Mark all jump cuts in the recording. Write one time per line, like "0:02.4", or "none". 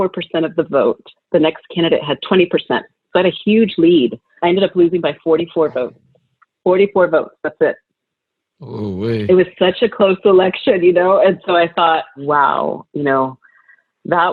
0:01.1
0:02.2
0:04.3
0:12.2